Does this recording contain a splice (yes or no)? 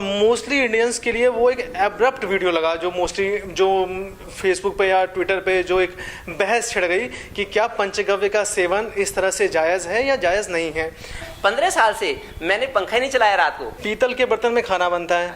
yes